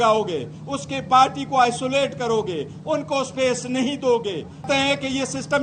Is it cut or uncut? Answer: cut